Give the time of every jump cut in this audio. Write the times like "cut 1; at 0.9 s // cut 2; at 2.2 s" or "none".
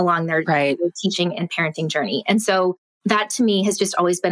cut 1; at 2.9 s